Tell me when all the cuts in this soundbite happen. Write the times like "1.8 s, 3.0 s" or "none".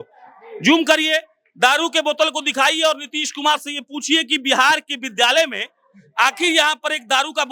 none